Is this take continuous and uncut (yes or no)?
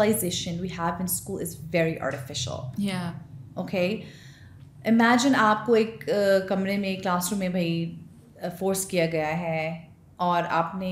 yes